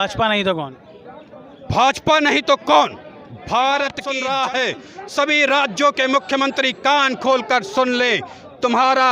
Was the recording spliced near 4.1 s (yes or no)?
yes